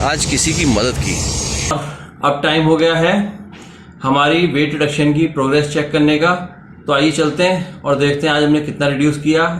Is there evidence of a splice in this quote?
yes; 1 cut; at 1.7 s

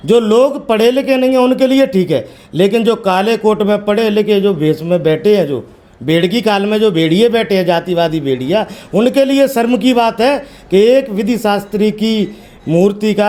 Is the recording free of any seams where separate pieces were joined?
yes; 0 cuts

